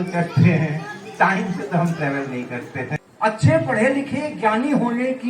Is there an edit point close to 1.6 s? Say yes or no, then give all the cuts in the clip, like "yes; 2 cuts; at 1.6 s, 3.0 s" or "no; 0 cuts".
no; 1 cut; at 2.9 s